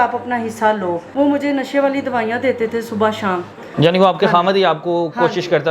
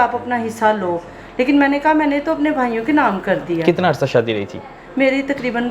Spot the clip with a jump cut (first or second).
first